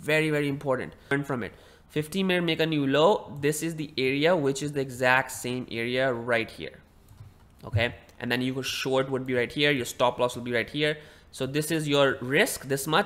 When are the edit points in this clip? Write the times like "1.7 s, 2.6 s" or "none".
1.2 s